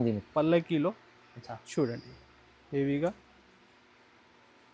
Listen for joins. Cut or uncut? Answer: uncut